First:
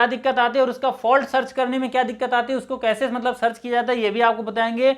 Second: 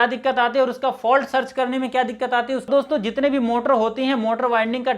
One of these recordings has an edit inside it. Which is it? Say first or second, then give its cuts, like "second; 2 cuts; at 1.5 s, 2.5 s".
second; 1 cut; at 2.7 s